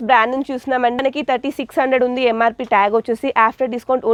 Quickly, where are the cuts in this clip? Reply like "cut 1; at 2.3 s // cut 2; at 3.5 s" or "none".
none